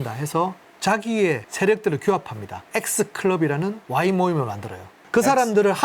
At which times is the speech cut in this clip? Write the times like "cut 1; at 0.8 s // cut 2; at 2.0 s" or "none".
cut 1; at 4.9 s